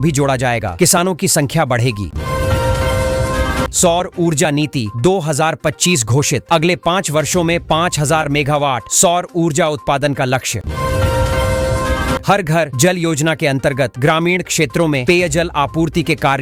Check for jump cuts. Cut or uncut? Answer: uncut